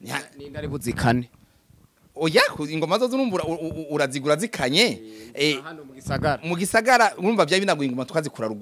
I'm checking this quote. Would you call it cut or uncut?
uncut